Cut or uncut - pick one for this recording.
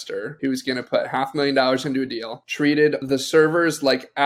cut